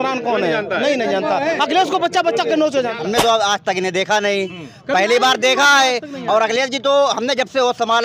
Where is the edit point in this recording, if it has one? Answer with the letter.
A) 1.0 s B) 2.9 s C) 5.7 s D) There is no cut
B